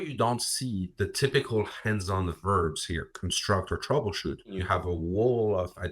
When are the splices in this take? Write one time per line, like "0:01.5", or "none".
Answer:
0:04.6